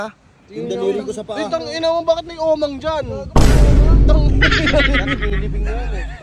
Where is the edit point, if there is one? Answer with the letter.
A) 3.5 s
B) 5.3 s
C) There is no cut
C